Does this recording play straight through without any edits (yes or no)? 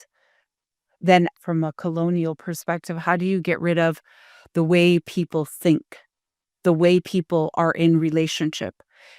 no